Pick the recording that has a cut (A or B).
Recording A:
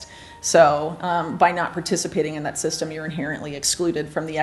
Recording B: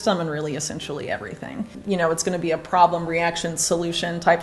B